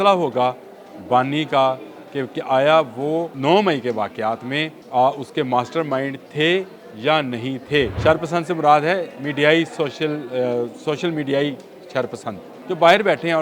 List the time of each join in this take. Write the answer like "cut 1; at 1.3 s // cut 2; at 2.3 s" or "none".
cut 1; at 3.3 s // cut 2; at 4.7 s // cut 3; at 7.9 s // cut 4; at 12.5 s